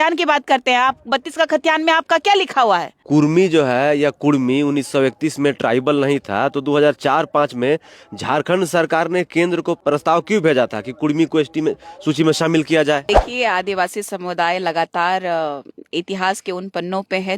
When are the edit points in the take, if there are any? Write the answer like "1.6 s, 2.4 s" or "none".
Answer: 2.9 s, 9.8 s, 13.0 s